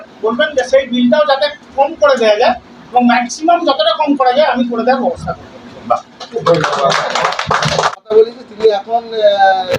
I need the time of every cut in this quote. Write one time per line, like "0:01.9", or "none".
0:08.0